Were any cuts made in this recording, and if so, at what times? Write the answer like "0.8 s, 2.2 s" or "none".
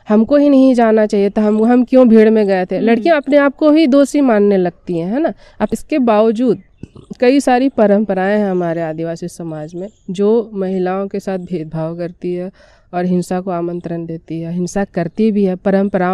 5.7 s